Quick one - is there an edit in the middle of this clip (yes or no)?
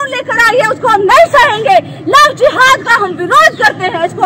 no